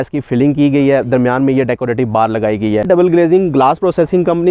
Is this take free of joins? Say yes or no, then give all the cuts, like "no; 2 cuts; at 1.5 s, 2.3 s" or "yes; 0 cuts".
no; 1 cut; at 2.8 s